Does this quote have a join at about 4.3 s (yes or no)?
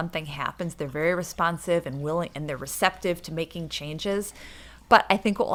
no